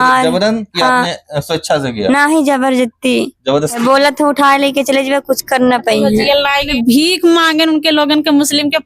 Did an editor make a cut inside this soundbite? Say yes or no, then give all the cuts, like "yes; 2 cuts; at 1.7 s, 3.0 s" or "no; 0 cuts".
yes; 2 cuts; at 3.8 s, 6.7 s